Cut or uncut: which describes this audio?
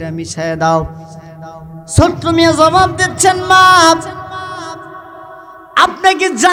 uncut